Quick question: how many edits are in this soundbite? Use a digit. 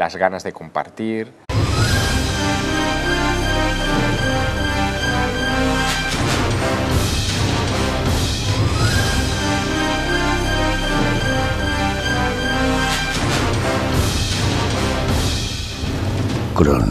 0